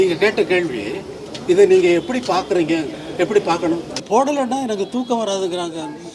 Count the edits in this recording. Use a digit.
1